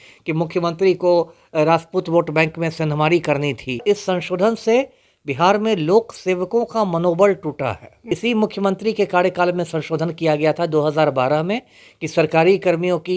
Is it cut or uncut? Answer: cut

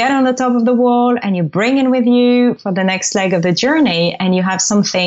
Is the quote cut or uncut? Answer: uncut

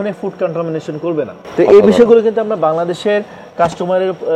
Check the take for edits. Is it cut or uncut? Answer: uncut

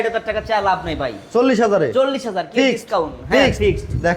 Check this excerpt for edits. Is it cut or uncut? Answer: uncut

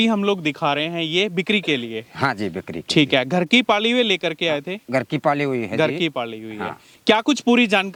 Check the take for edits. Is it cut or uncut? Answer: uncut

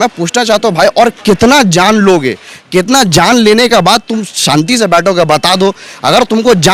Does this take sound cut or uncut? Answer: uncut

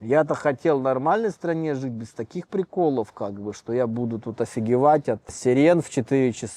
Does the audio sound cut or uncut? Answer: uncut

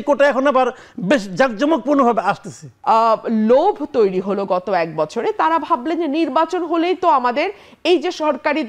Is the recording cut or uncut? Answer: cut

